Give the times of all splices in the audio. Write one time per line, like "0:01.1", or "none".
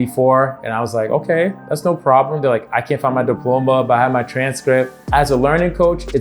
0:05.0